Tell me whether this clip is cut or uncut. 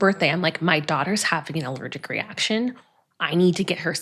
uncut